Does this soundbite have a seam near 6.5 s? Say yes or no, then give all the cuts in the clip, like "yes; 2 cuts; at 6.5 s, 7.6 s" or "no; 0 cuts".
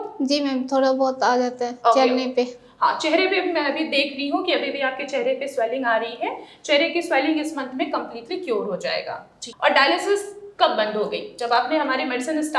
no; 1 cut; at 9.4 s